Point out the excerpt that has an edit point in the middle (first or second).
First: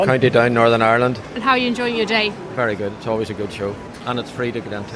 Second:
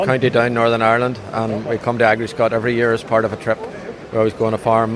first